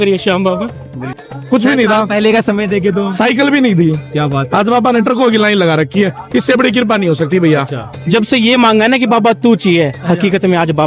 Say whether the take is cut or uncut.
cut